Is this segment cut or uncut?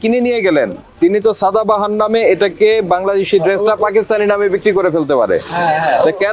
uncut